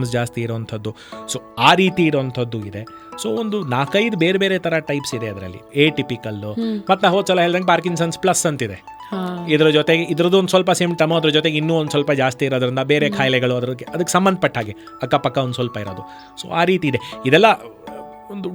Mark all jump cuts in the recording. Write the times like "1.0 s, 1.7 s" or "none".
none